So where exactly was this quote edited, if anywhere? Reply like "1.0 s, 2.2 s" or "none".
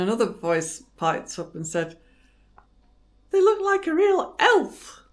none